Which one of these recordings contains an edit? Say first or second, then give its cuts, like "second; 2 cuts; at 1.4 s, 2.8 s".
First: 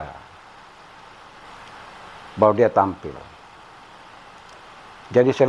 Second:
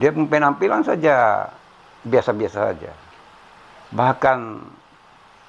first; 1 cut; at 1.4 s